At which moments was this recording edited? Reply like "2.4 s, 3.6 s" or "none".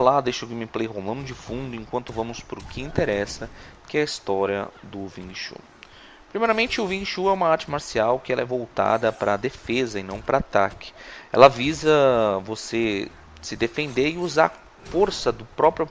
8.7 s